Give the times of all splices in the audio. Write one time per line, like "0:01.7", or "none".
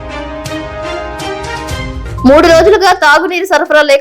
0:00.9